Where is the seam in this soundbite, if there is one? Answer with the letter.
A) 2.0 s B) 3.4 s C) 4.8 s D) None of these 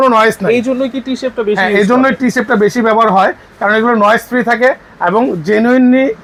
D